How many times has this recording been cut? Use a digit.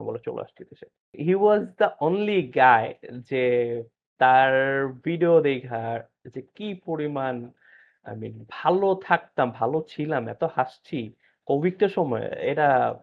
1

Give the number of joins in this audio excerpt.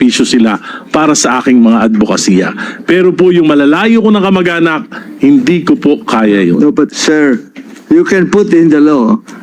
1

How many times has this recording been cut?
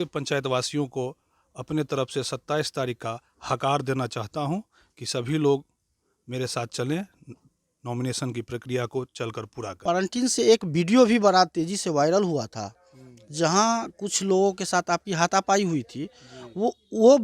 1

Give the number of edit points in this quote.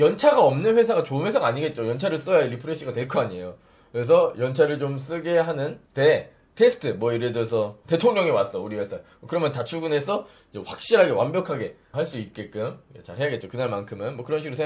1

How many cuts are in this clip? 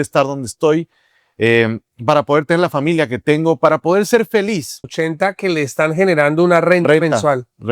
1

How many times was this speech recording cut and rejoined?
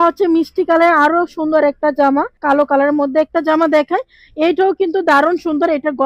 1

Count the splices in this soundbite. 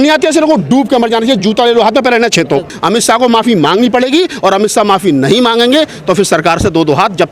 1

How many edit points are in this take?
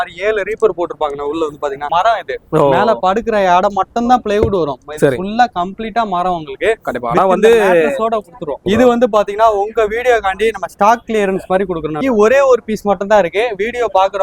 3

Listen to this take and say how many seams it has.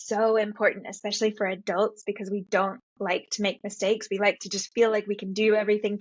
0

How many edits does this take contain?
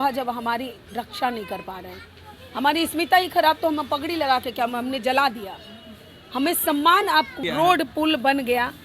1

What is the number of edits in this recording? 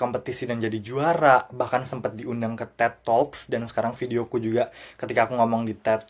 0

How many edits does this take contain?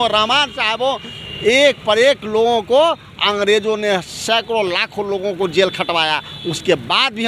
0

